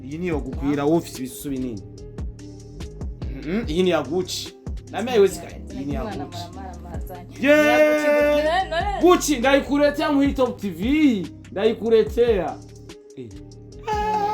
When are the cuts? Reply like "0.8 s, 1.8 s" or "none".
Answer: 1.8 s, 3.3 s